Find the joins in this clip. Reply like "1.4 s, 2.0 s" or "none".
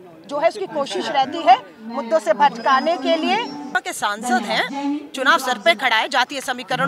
3.7 s